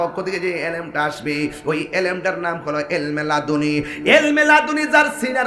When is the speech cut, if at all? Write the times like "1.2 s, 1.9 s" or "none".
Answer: none